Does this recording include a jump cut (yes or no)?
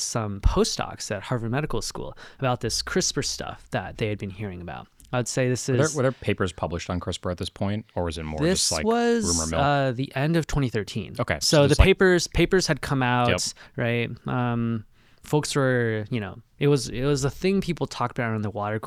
no